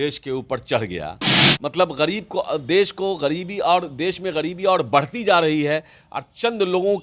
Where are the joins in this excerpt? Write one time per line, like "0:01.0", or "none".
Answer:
0:01.4